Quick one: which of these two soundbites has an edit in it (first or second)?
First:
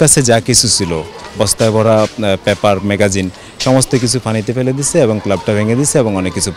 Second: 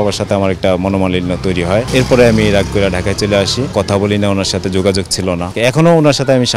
second